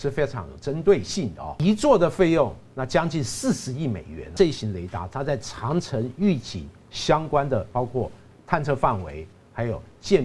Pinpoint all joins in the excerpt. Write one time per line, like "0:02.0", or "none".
0:01.5
0:04.3